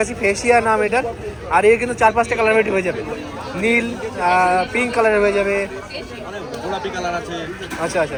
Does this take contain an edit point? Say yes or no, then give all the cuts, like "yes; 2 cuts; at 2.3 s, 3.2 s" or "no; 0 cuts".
no; 0 cuts